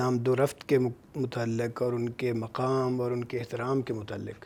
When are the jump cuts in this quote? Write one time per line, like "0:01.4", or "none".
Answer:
none